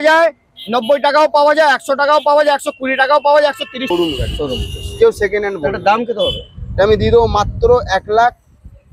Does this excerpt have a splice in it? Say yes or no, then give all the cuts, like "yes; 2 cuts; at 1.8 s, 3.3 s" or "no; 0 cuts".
yes; 1 cut; at 3.8 s